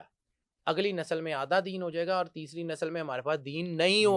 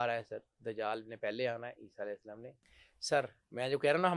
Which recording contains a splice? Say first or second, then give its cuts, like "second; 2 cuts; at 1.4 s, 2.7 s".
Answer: second; 1 cut; at 2.7 s